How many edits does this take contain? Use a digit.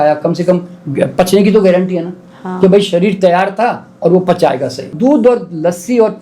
1